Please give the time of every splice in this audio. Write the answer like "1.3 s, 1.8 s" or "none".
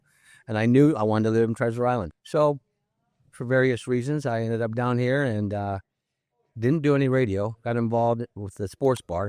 2.1 s